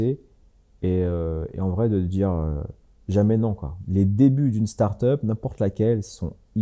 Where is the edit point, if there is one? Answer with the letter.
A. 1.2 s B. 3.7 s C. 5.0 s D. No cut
B